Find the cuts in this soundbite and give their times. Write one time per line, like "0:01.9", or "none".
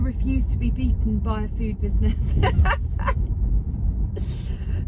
none